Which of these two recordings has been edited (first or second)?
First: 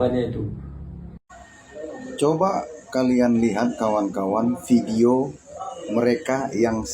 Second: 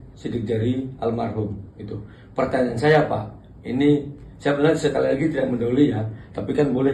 first